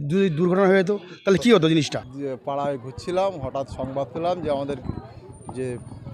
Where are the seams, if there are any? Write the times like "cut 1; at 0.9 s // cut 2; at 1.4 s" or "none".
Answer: cut 1; at 2.1 s